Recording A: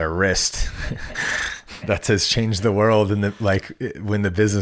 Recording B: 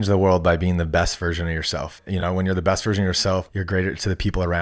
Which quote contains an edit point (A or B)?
B